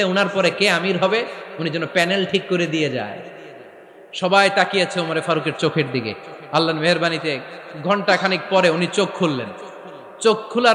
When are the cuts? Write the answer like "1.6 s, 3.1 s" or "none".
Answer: none